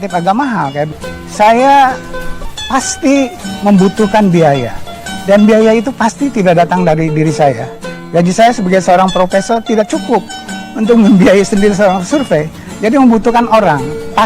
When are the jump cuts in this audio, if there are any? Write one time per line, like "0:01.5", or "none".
0:00.9

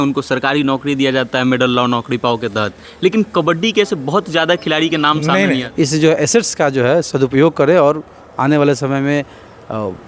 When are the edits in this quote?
0:05.7

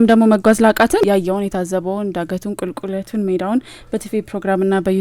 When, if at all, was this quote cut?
0:01.0

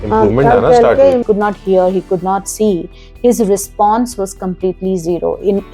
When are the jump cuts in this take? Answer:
0:01.2

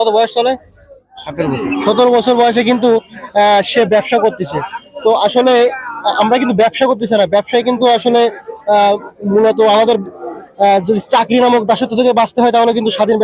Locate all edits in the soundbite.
none

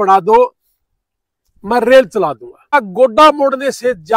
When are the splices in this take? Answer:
0:02.7

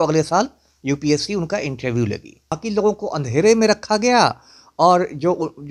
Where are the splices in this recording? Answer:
0:02.6

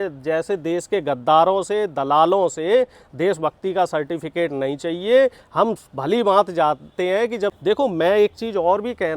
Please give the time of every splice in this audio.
0:07.6

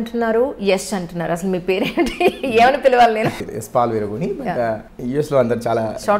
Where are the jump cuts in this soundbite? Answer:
0:03.4
0:04.9

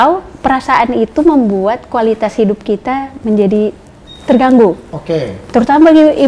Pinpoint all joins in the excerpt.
none

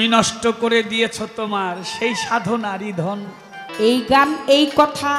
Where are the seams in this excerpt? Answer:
0:03.6

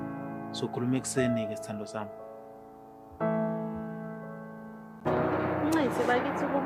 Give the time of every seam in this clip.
0:05.1

